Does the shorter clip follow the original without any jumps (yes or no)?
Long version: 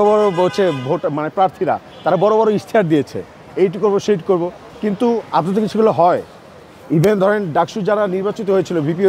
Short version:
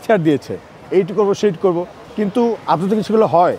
yes